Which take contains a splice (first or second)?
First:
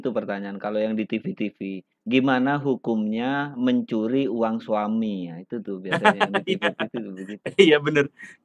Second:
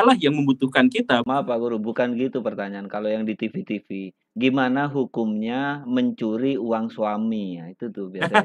second